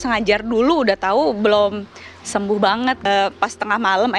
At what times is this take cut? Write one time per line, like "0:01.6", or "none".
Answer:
0:03.1